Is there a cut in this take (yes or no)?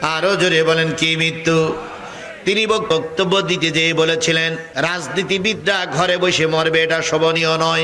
yes